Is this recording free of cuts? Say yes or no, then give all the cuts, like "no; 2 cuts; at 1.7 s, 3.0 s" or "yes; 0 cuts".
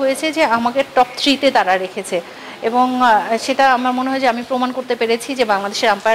yes; 0 cuts